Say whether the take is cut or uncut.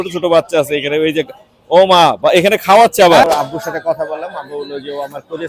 cut